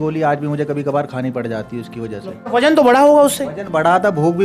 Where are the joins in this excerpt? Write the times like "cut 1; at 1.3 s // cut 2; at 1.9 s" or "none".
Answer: cut 1; at 2.5 s